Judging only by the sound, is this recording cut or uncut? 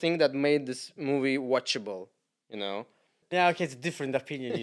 uncut